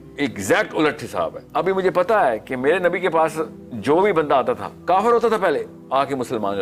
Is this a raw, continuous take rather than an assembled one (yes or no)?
no